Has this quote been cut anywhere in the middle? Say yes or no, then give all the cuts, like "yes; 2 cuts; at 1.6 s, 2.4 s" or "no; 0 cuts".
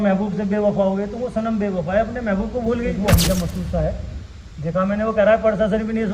yes; 1 cut; at 2.9 s